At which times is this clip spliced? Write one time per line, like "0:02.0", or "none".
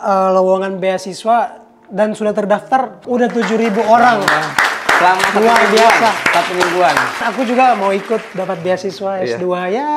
0:03.0
0:07.3